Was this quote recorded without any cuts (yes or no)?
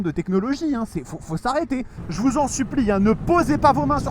no